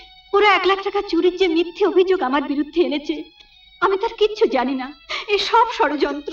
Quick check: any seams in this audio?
no; 0 cuts

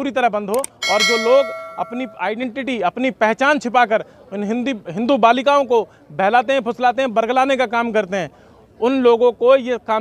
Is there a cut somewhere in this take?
no; 0 cuts

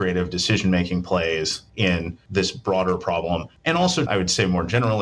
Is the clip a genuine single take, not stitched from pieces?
no; 1 cut; at 4.1 s

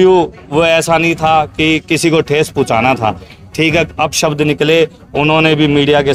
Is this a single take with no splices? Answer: yes; 0 cuts

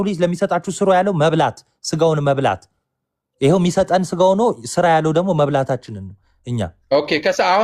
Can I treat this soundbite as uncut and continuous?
yes; 0 cuts

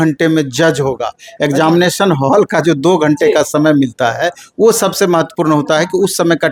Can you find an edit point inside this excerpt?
no; 0 cuts

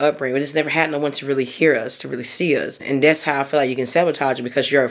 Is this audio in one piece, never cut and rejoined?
no; 1 cut; at 2.8 s

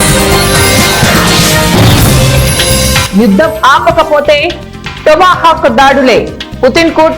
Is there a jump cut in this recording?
yes; 1 cut; at 3.0 s

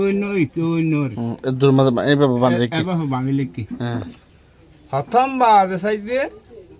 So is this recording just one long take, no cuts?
yes; 0 cuts

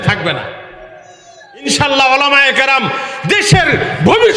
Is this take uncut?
no; 1 cut; at 1.7 s

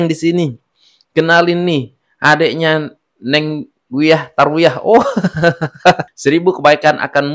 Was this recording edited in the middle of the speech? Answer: yes; 1 cut; at 6.1 s

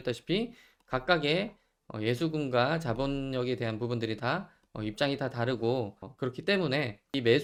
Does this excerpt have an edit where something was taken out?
no; 0 cuts

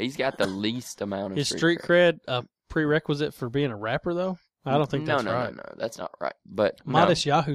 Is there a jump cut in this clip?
no; 0 cuts

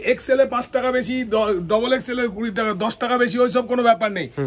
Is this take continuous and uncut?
yes; 0 cuts

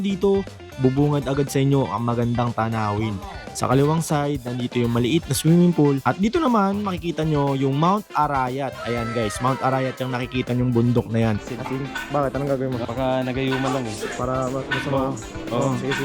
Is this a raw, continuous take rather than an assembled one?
no; 3 cuts; at 6.0 s, 11.3 s, 12.8 s

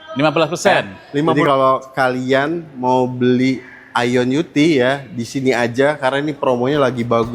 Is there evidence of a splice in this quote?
yes; 1 cut; at 1.4 s

